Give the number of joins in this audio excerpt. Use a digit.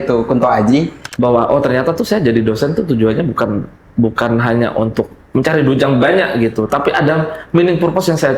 1